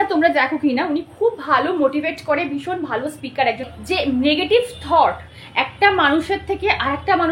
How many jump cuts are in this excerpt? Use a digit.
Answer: 1